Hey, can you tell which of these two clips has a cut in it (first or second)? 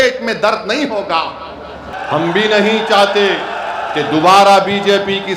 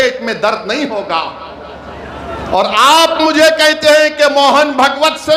first